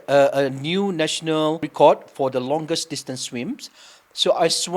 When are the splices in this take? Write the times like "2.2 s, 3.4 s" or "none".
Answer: 1.7 s